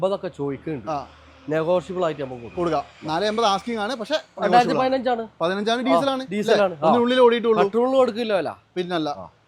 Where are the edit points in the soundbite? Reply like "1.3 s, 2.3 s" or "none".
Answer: none